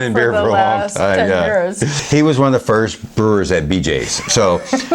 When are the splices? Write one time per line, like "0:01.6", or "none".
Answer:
0:01.9